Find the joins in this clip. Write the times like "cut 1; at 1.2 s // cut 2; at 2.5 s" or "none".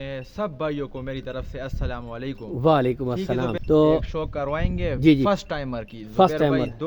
cut 1; at 3.6 s